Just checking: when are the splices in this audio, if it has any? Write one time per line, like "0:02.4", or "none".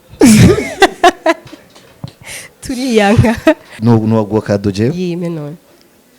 0:03.7